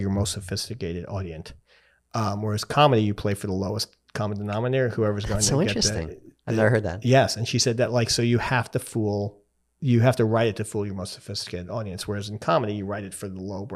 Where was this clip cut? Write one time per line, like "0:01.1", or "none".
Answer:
none